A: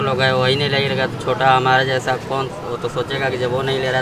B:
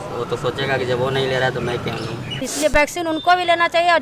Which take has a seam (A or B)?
B